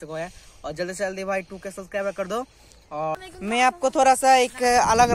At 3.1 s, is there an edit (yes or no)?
yes